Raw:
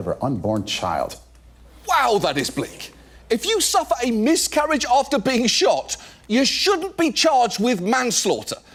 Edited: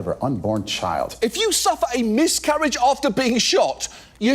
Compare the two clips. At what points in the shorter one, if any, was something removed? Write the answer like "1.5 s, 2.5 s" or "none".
1.1 s